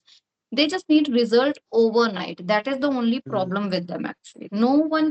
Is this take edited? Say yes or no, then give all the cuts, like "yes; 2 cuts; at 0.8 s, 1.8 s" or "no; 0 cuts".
no; 0 cuts